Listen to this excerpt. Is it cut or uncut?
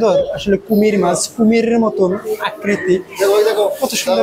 uncut